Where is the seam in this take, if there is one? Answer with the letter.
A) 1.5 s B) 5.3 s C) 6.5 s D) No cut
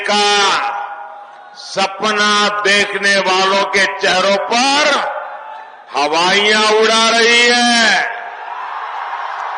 D